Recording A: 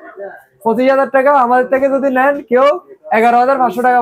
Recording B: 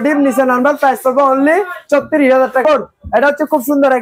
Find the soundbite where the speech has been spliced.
B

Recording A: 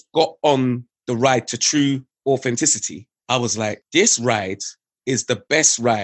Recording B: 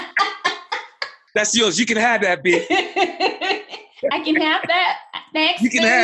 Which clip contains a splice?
A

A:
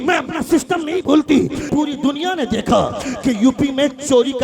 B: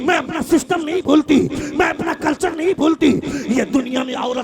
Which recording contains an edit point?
A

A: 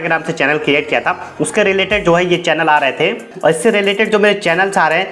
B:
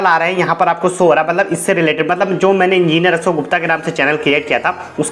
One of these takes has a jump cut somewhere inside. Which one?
A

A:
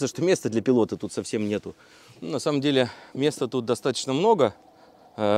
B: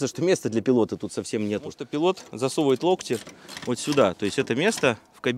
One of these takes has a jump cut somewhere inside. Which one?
B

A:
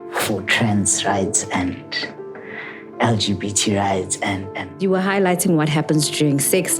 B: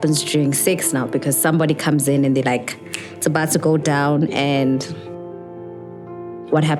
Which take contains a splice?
A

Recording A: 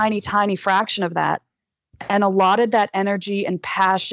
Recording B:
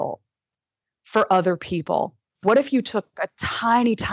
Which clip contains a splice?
B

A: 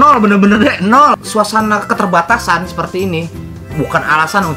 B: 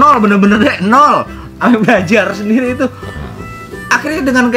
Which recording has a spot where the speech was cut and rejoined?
A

